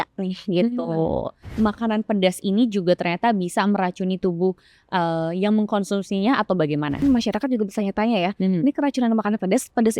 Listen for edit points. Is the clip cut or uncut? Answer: cut